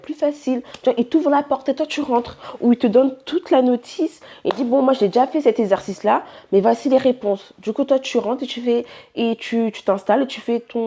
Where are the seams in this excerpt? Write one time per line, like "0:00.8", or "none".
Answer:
none